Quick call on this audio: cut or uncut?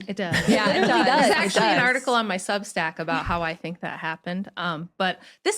uncut